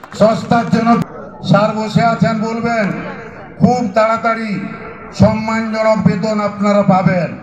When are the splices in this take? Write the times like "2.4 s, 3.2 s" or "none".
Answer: 1.0 s